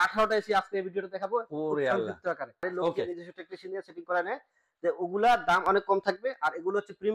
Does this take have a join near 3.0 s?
yes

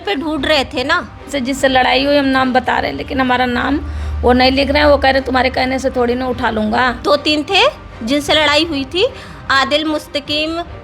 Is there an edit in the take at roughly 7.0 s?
yes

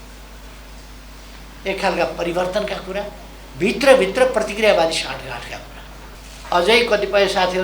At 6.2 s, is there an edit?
yes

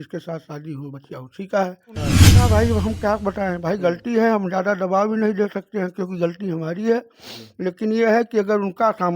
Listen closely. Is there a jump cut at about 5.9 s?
no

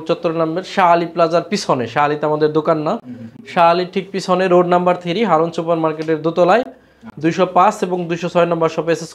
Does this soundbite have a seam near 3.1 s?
no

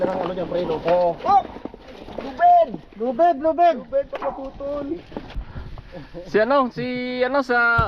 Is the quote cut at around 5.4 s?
yes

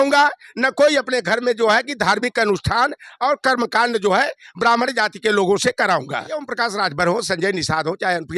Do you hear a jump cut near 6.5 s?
yes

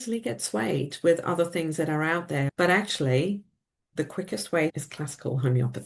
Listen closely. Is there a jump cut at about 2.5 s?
yes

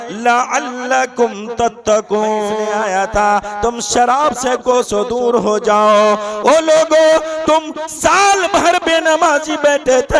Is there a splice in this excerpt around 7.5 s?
no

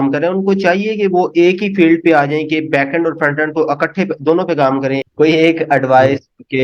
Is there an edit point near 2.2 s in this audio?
no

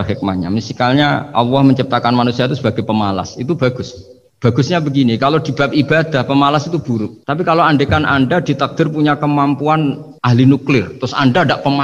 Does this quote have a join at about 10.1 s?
yes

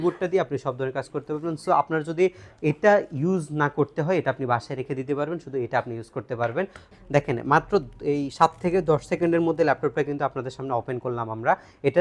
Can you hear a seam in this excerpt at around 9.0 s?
no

